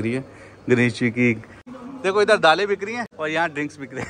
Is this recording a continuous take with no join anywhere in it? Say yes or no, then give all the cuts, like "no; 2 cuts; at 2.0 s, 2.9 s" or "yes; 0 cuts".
no; 2 cuts; at 1.7 s, 3.1 s